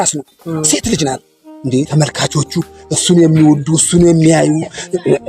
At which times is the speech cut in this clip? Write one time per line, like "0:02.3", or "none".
0:01.8